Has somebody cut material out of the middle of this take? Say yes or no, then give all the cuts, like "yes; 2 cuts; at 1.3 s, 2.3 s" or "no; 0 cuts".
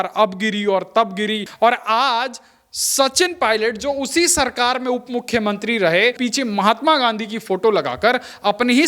yes; 2 cuts; at 1.5 s, 6.2 s